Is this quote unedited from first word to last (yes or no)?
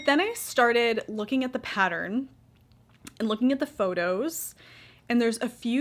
yes